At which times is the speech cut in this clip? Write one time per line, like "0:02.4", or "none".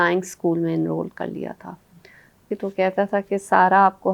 0:02.4